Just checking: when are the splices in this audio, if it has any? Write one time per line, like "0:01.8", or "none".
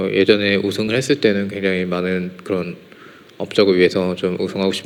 none